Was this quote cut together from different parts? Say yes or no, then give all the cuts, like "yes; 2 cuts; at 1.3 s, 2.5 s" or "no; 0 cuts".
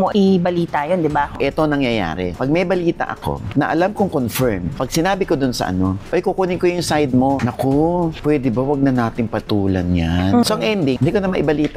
yes; 4 cuts; at 1.3 s, 4.7 s, 7.4 s, 10.4 s